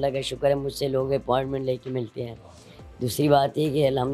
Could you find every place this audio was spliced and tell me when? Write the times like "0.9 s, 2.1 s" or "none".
none